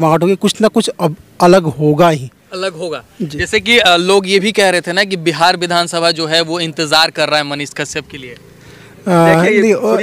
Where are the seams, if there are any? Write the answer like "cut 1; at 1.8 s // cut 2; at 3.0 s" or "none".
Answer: none